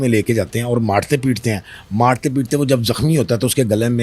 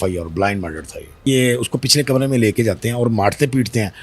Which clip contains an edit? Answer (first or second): second